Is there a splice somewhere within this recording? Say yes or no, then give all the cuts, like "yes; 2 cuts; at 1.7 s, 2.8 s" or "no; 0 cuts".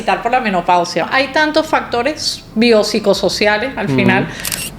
yes; 1 cut; at 1.1 s